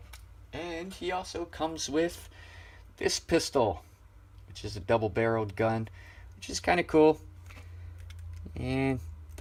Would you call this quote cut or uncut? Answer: uncut